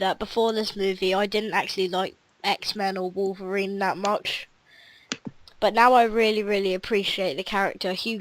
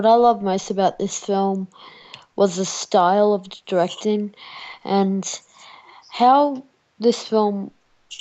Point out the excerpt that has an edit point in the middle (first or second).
first